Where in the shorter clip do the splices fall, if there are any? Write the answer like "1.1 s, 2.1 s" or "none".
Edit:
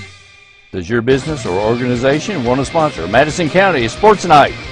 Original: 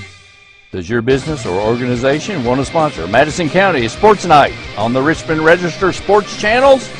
none